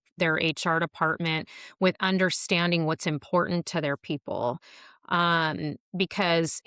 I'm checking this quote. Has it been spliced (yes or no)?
no